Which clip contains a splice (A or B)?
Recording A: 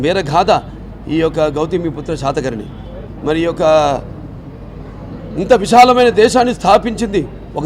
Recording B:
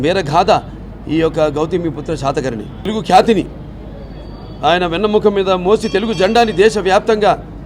B